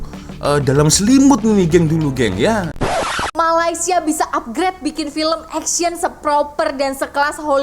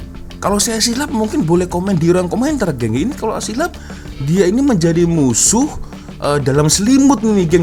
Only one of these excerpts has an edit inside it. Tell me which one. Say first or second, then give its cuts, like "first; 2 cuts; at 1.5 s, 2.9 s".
first; 1 cut; at 3.0 s